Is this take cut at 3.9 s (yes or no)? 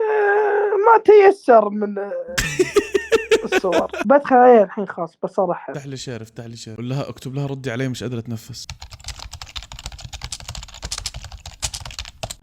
yes